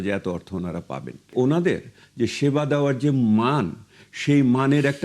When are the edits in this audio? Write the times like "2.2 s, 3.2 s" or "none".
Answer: 1.3 s